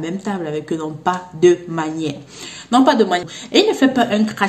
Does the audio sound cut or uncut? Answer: cut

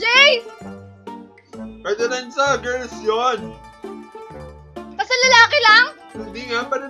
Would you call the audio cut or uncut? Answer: uncut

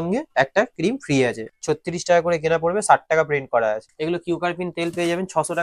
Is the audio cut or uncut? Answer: cut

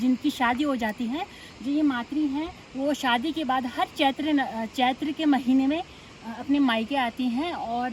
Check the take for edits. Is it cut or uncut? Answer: uncut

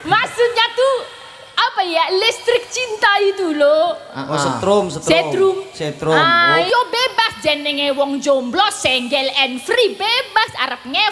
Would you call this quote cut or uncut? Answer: cut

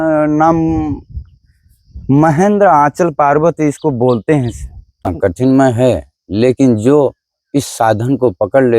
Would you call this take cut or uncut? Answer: cut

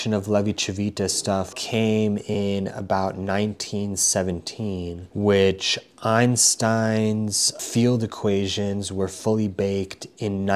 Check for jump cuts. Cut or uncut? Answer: cut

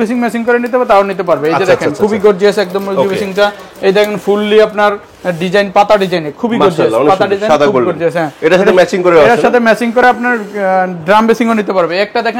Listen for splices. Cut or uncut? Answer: uncut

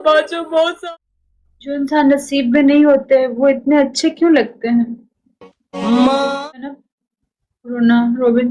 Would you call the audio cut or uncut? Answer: cut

